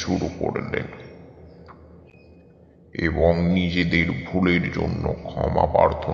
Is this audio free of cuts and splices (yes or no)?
yes